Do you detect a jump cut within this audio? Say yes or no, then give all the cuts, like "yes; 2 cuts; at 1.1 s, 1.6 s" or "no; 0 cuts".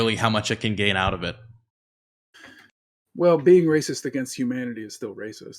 no; 0 cuts